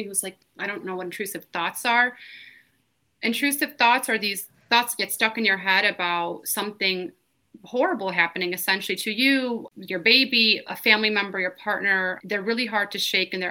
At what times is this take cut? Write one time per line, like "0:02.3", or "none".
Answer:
0:09.7
0:10.7
0:12.2